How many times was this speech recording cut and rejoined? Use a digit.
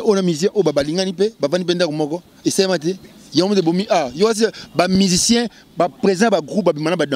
0